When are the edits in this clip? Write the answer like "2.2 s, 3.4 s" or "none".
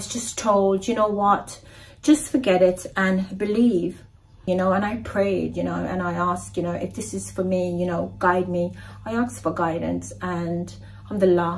4.4 s